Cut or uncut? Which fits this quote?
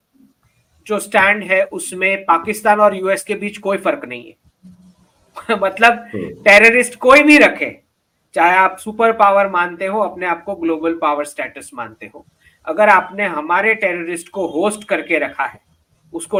uncut